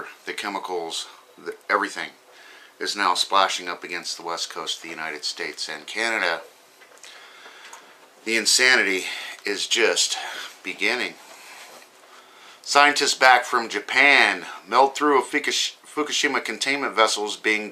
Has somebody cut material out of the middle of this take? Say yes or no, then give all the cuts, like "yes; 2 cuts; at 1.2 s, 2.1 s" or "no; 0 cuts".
yes; 1 cut; at 6.2 s